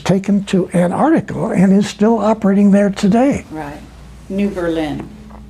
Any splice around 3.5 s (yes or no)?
no